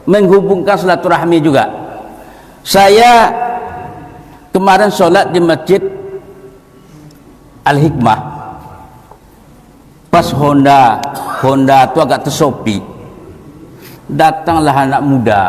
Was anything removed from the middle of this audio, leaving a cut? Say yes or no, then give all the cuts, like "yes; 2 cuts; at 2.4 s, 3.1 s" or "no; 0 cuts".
no; 0 cuts